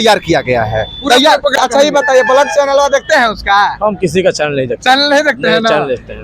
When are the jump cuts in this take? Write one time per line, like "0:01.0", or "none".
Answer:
0:01.5